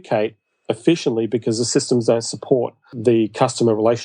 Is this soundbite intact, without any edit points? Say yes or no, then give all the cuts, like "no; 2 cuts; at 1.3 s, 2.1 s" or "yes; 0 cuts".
no; 1 cut; at 2.9 s